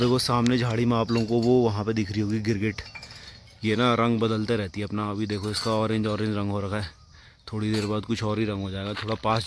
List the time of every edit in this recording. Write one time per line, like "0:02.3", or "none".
none